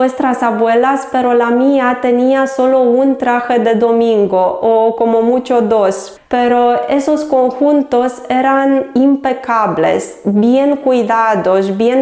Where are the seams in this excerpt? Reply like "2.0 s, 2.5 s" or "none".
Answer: none